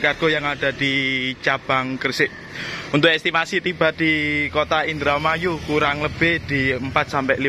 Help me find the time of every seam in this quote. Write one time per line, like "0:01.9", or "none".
none